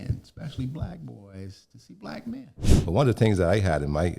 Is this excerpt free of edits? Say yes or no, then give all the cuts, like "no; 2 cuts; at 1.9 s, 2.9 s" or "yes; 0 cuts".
no; 1 cut; at 2.6 s